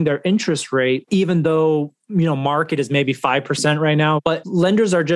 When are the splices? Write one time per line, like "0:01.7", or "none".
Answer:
0:04.2